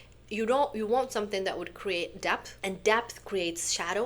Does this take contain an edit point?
yes; 1 cut; at 2.5 s

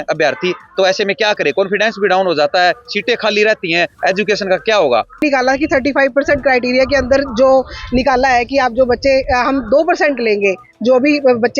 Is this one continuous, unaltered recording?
no; 1 cut; at 5.2 s

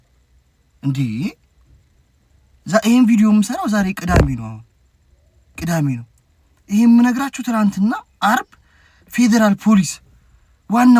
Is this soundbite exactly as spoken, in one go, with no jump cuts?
yes; 0 cuts

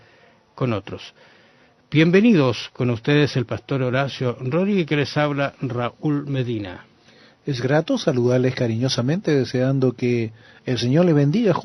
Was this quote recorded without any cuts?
no; 1 cut; at 10.2 s

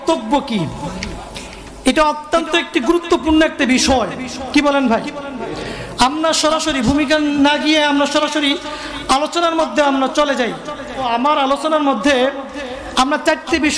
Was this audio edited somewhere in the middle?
yes; 1 cut; at 11.1 s

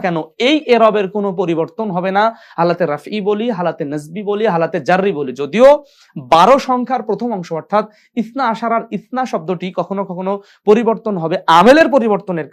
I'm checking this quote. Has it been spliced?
no; 0 cuts

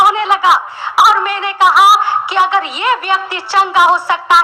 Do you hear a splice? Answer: no; 0 cuts

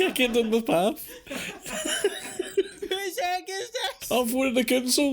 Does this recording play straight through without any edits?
no; 2 cuts; at 2.8 s, 4.0 s

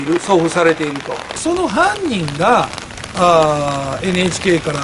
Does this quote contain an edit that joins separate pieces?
yes; 1 cut; at 1.4 s

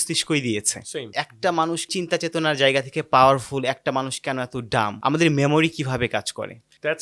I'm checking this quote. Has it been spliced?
no; 0 cuts

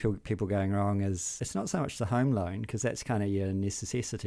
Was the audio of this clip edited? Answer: yes; 1 cut; at 1.4 s

